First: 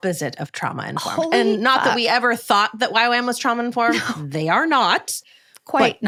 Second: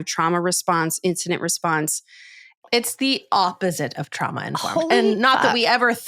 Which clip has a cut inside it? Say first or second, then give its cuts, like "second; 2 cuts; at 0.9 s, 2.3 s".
second; 1 cut; at 2.5 s